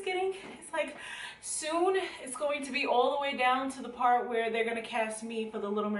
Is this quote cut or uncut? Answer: uncut